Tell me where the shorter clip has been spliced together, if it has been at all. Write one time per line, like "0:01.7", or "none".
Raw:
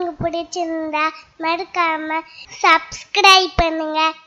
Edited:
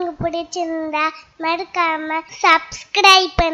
0:02.3